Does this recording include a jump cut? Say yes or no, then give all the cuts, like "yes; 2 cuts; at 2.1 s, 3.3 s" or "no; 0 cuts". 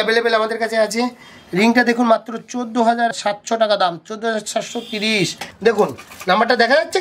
yes; 1 cut; at 5.4 s